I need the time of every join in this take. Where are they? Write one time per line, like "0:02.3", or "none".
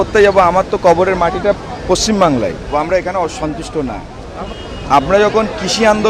0:02.7
0:04.4

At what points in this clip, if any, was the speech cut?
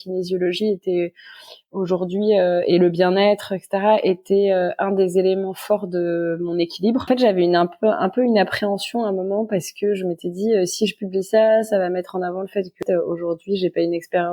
0:07.1
0:12.8

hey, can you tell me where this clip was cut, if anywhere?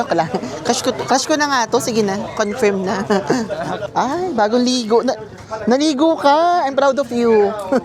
none

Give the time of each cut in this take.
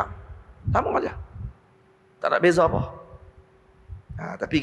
none

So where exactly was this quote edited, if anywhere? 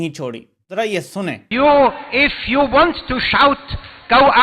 0:01.4

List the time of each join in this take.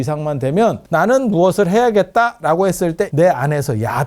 0:00.8
0:03.1

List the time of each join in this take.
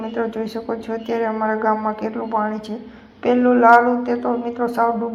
none

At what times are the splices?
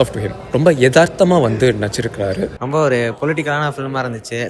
0:02.6

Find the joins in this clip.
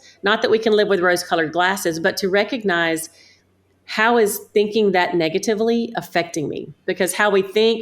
none

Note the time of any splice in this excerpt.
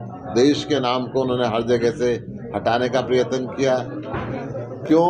none

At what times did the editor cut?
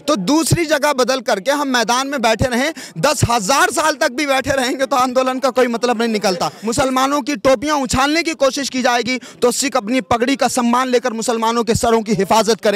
0:06.6

